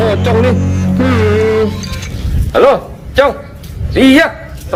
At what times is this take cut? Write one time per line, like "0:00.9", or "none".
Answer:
none

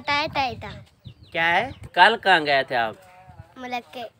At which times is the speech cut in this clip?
0:01.8

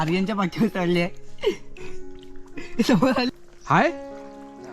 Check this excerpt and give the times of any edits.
0:03.3

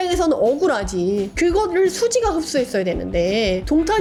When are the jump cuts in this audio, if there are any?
none

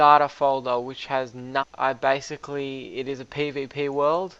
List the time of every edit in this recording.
none

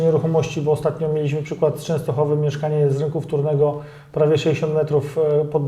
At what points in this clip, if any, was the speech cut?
none

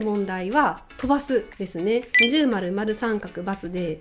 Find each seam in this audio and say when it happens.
0:02.1

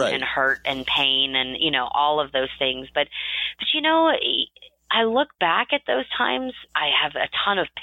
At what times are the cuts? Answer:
0:06.6

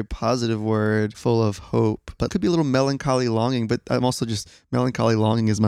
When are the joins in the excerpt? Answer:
none

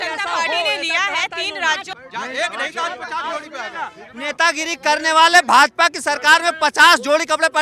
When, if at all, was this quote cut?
0:01.9

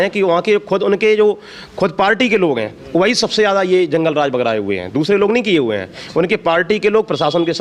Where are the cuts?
none

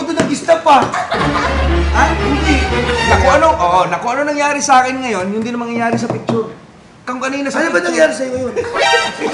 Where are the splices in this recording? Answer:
0:02.8

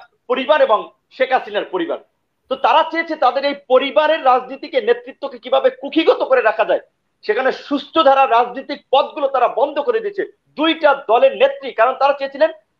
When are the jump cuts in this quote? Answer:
none

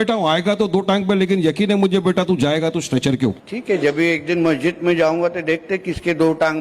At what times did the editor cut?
0:03.4

